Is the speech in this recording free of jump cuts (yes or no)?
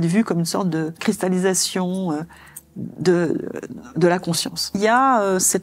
no